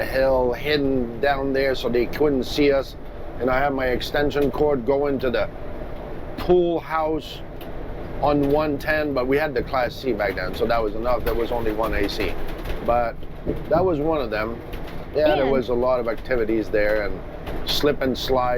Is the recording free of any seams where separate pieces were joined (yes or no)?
yes